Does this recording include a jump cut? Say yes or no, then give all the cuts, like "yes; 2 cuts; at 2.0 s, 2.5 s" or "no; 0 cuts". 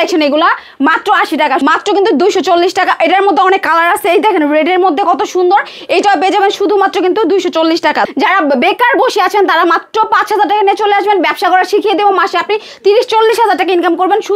yes; 2 cuts; at 1.6 s, 8.0 s